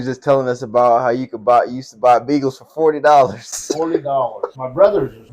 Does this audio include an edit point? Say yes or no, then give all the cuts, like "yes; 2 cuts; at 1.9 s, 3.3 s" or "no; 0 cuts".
no; 0 cuts